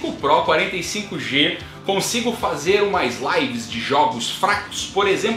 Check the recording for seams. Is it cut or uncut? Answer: uncut